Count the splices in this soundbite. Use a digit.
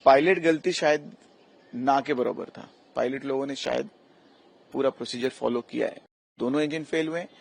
1